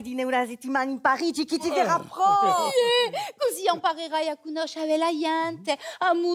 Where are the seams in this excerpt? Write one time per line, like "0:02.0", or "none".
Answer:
none

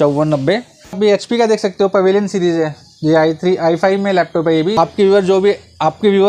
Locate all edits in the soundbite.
0:01.0
0:04.8

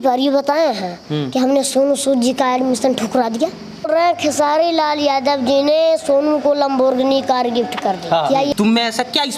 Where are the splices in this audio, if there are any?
0:03.9
0:08.5

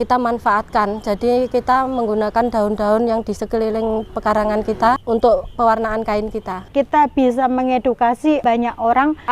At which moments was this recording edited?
0:05.0
0:06.7
0:08.4

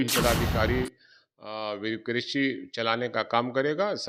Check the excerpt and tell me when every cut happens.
none

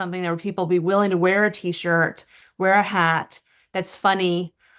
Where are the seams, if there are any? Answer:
none

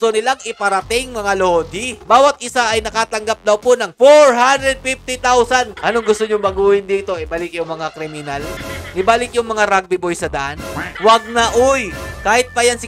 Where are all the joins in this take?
0:02.0
0:05.7
0:08.6
0:10.8

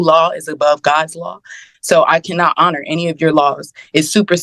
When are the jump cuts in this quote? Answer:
none

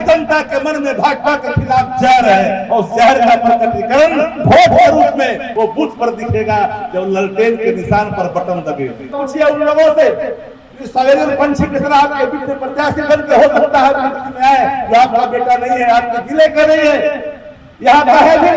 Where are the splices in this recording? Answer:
0:05.4
0:09.2

